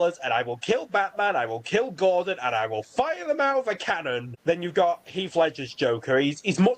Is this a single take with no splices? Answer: no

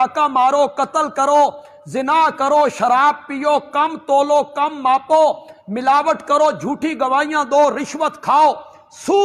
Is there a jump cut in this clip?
no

